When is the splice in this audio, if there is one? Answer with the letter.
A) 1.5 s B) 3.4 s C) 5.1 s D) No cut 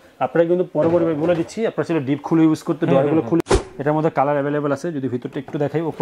B